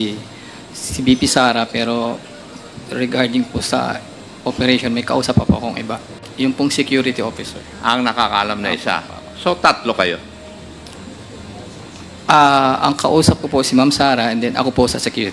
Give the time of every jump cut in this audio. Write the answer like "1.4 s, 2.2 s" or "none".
none